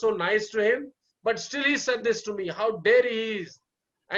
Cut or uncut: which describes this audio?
cut